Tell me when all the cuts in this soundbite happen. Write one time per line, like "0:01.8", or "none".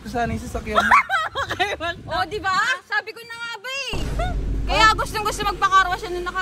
0:04.0